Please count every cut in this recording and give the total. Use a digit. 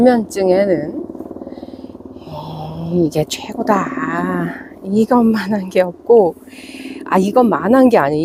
0